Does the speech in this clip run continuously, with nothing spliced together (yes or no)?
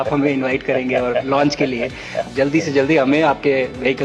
no